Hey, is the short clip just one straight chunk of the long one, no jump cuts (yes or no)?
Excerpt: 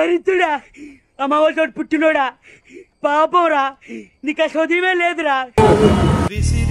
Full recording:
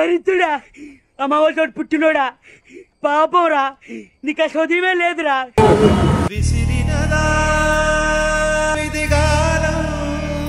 yes